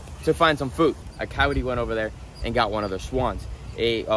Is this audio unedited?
no; 1 cut; at 1.2 s

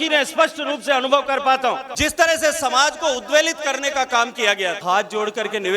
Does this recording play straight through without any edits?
no; 2 cuts; at 1.9 s, 4.8 s

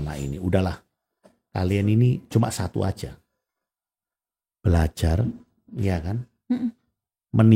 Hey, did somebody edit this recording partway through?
no; 0 cuts

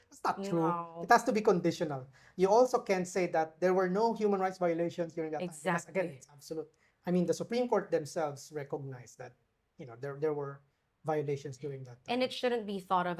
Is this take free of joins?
yes; 0 cuts

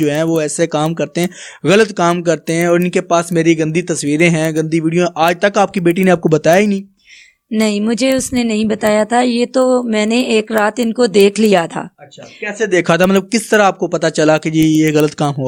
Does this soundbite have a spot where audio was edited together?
no; 0 cuts

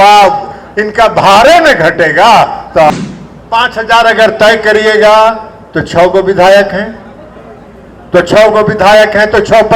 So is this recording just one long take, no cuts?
no; 1 cut; at 2.9 s

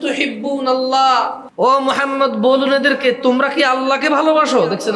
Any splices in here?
yes; 1 cut; at 1.4 s

